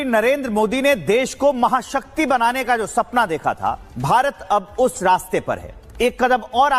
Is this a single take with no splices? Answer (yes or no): yes